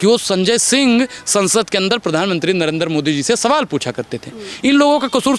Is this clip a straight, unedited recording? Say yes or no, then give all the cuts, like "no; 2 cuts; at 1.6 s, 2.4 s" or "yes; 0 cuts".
yes; 0 cuts